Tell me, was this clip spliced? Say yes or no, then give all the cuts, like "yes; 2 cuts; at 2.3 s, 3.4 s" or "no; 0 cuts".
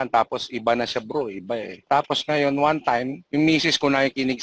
yes; 2 cuts; at 1.9 s, 3.2 s